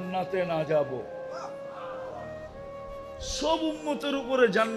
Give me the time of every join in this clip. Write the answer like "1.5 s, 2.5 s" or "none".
1.2 s, 3.2 s